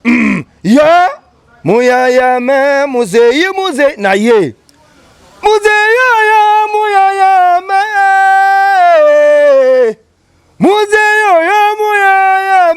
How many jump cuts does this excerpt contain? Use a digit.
0